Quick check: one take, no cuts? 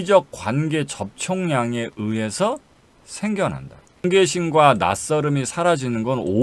no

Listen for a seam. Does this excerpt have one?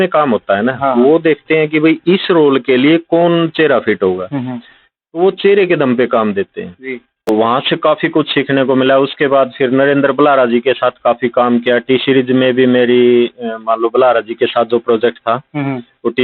yes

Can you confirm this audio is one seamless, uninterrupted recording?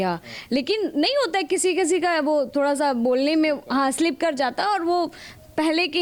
yes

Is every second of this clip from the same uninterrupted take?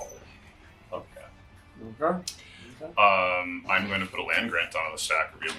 yes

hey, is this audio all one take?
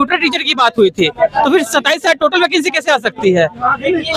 yes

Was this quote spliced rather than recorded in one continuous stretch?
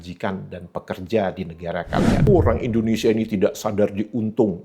yes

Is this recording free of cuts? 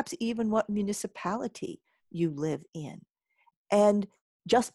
yes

